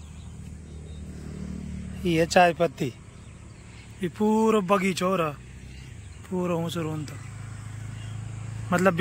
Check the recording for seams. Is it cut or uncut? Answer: uncut